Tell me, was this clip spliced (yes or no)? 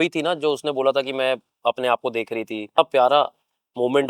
yes